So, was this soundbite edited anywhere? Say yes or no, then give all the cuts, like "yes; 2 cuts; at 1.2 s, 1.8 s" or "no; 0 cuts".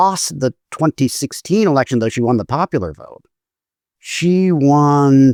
no; 0 cuts